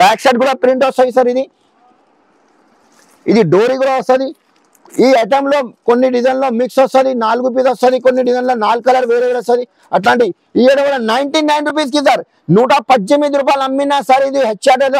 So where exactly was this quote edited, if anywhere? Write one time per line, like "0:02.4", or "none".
none